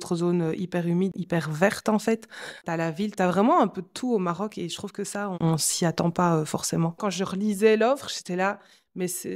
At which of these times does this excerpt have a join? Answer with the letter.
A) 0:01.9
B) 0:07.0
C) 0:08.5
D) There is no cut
B